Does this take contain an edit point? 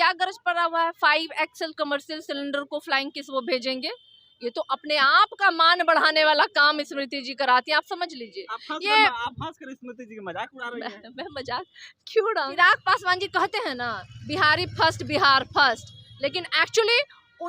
yes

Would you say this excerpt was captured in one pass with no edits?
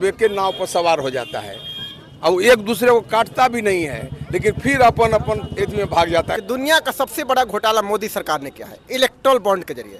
no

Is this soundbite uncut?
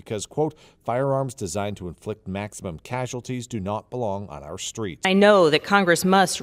yes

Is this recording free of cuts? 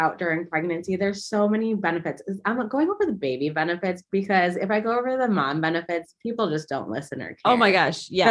yes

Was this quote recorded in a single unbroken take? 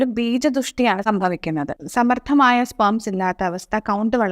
no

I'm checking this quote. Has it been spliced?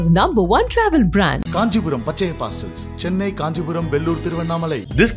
no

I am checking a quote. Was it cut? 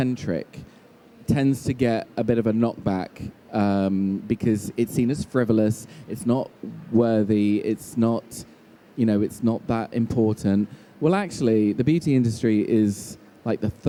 no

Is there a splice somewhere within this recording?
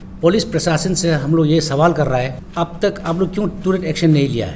yes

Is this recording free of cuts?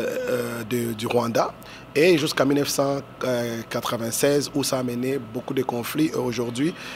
yes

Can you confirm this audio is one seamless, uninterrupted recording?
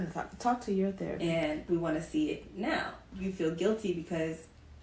no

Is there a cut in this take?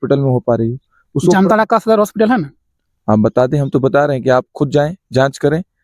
no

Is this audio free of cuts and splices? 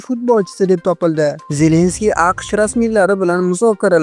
no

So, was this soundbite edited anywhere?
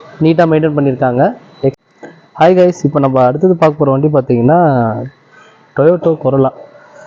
yes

